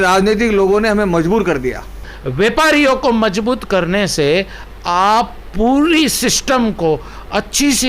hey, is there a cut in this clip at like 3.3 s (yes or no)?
no